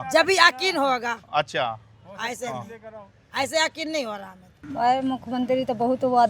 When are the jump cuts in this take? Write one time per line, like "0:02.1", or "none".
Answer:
0:04.6